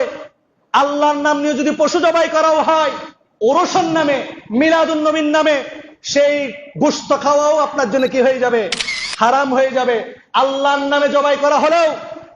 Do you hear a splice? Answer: no; 0 cuts

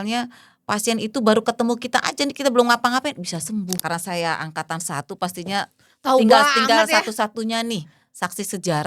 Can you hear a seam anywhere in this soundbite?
yes; 1 cut; at 3.7 s

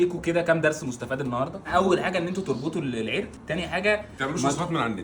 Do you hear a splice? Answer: yes; 1 cut; at 1.7 s

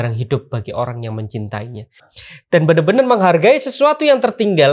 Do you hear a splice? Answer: yes; 1 cut; at 2.1 s

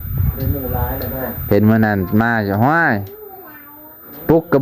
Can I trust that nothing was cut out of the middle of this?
yes; 0 cuts

